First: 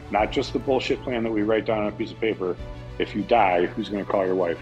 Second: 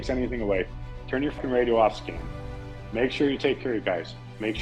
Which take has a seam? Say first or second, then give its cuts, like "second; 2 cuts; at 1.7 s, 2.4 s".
second; 1 cut; at 1.4 s